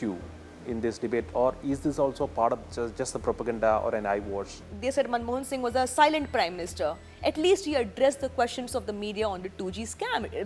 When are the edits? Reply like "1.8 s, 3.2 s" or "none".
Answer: 4.7 s